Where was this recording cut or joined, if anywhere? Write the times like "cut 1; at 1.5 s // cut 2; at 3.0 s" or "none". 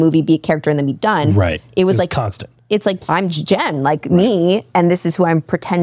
cut 1; at 3.0 s